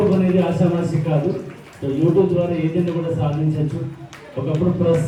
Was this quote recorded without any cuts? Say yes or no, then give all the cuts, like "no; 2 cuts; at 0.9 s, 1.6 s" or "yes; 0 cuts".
yes; 0 cuts